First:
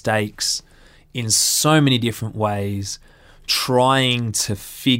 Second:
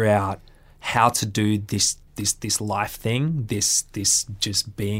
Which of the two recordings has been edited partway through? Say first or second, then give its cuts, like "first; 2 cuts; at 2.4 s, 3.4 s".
second; 1 cut; at 2.0 s